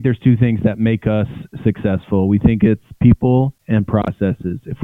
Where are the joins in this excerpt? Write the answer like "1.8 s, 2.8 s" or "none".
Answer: 3.6 s